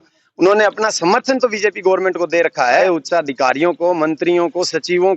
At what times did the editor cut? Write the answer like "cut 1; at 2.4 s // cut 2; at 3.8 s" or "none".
cut 1; at 2.8 s